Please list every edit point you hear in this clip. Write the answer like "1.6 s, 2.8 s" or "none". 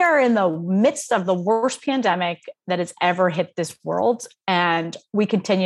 none